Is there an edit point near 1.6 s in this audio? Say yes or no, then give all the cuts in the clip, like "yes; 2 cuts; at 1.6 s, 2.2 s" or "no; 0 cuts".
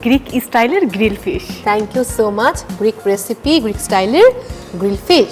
no; 0 cuts